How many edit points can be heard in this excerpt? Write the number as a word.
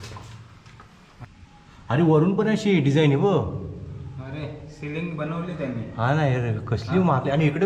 one